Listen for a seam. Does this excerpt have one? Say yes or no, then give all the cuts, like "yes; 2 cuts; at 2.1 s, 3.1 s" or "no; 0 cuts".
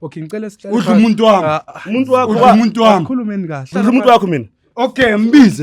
yes; 1 cut; at 3.7 s